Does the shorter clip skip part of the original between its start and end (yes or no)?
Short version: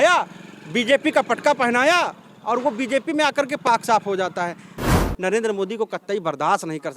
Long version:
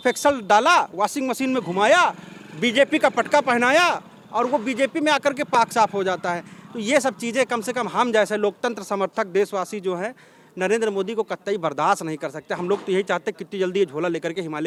yes